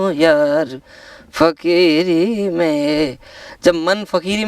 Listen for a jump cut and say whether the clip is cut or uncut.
uncut